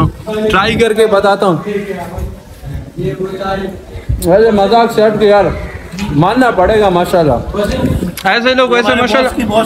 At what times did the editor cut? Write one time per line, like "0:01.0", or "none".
0:07.7